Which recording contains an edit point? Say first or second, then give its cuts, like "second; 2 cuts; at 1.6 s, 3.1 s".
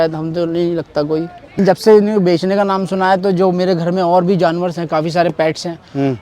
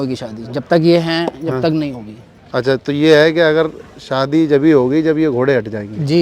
first; 1 cut; at 1.6 s